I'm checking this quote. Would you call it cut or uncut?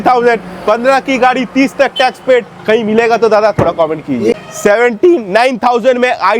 cut